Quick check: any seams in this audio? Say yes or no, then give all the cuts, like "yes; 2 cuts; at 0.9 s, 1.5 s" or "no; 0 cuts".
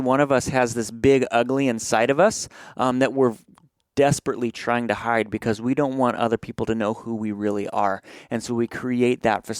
no; 0 cuts